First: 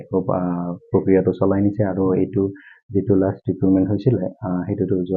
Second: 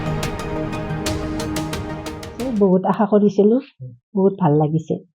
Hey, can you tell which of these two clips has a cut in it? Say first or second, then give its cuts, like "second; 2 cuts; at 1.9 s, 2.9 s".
second; 1 cut; at 2.3 s